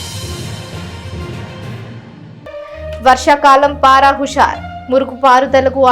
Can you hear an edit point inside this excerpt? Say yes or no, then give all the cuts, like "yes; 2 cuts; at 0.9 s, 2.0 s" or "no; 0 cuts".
yes; 1 cut; at 2.3 s